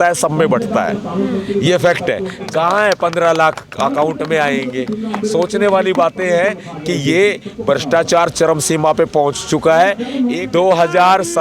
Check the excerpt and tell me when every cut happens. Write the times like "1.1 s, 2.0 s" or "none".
2.3 s, 10.4 s